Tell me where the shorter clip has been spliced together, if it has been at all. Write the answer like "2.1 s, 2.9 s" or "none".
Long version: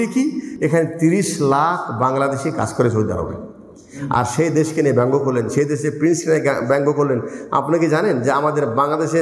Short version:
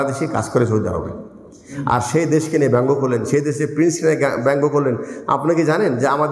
none